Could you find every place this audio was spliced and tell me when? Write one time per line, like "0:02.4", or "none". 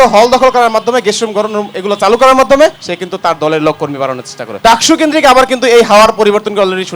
0:02.9
0:04.6